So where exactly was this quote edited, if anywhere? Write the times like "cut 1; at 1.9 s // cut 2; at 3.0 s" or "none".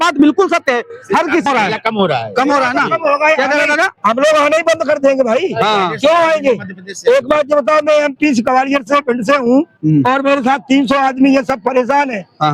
cut 1; at 1.4 s